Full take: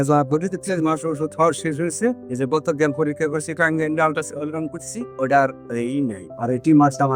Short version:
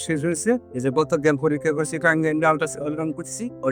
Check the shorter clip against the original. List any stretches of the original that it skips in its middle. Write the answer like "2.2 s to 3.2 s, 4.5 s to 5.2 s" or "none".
none